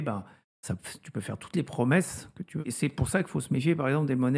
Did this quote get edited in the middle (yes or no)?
yes